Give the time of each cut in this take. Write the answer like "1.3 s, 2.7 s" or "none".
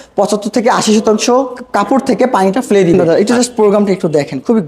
3.1 s